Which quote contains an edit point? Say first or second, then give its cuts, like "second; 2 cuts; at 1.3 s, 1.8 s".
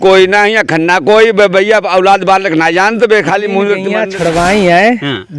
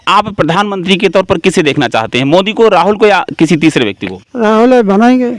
first; 1 cut; at 3.9 s